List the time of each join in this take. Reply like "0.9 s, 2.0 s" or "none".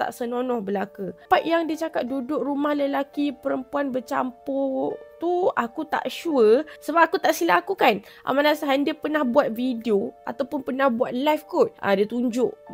1.2 s